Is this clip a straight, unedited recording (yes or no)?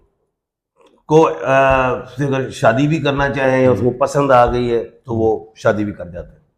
yes